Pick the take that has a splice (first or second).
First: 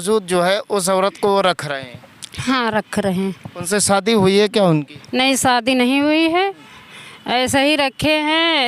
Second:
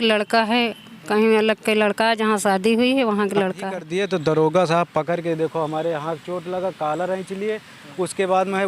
second